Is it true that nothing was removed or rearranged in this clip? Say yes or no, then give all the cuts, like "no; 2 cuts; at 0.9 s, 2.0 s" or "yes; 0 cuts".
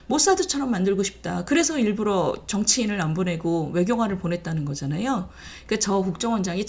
yes; 0 cuts